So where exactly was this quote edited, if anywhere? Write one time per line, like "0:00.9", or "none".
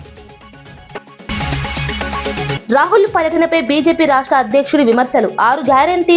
0:01.0